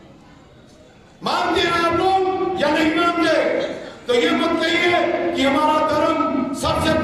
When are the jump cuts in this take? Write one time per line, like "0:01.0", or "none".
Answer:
none